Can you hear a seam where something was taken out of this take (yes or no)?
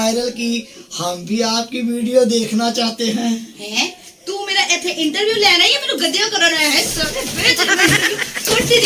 no